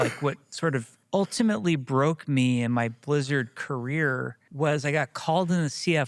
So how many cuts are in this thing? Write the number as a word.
two